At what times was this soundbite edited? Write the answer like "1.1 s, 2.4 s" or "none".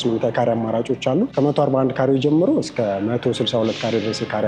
1.3 s